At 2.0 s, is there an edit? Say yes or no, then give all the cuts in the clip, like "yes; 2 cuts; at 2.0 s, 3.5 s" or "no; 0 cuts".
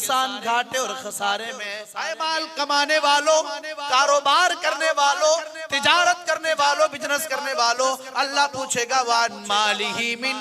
yes; 1 cut; at 2.0 s